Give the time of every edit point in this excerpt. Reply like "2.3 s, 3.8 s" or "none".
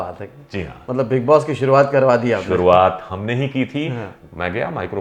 4.1 s